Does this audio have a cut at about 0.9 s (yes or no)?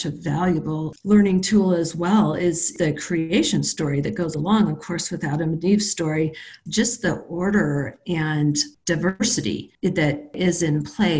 yes